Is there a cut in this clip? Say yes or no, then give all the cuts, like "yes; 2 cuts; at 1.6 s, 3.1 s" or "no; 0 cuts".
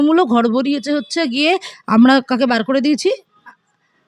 no; 0 cuts